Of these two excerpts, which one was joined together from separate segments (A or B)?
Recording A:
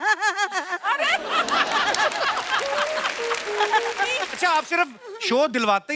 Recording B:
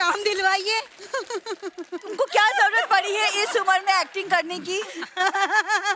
A